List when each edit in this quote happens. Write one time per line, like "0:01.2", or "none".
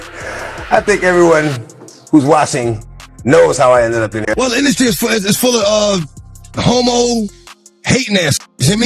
0:04.2